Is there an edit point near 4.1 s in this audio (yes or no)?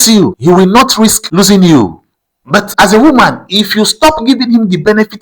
no